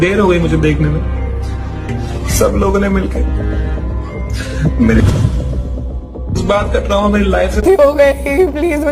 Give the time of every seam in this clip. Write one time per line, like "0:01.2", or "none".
none